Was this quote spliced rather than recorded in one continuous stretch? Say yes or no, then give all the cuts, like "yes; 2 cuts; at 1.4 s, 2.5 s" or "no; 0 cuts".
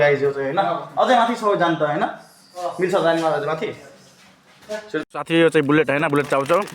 yes; 1 cut; at 5.1 s